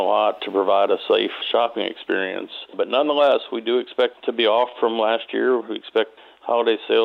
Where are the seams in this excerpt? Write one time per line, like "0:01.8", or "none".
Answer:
0:01.4
0:02.7
0:04.2
0:06.1